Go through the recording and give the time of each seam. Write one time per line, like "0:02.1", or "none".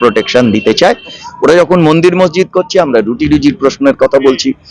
0:01.2

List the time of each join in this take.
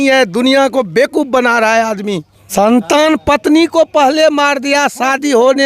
0:02.4

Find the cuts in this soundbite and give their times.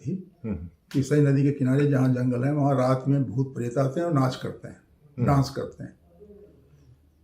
none

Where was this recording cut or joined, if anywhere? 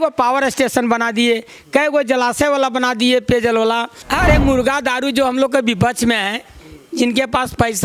0:04.0

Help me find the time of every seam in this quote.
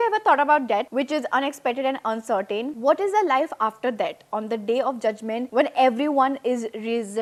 none

